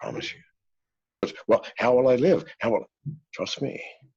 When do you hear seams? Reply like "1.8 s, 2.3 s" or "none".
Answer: 1.2 s